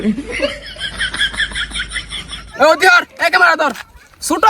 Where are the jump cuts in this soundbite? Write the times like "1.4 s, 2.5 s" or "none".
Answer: 2.4 s